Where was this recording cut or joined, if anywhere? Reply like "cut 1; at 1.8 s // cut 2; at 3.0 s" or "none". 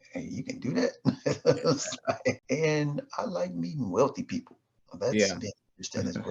cut 1; at 2.4 s